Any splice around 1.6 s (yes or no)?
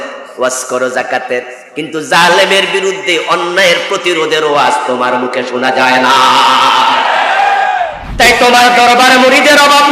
no